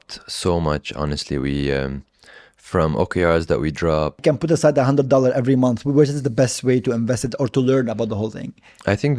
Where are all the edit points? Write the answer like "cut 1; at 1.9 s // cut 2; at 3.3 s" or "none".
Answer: cut 1; at 4.2 s